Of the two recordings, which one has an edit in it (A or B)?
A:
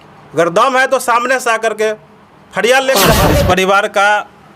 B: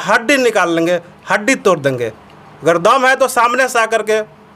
A